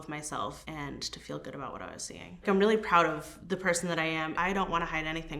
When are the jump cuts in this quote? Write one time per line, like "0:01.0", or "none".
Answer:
0:02.4
0:04.3